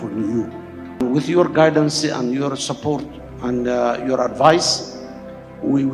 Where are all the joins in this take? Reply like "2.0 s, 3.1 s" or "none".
1.0 s